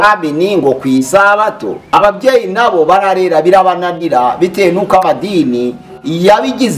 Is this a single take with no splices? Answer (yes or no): no